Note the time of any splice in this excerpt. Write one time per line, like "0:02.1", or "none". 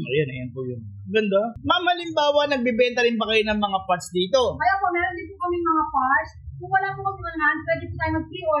0:01.6